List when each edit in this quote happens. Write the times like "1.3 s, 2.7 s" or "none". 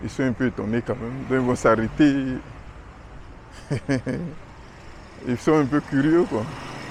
none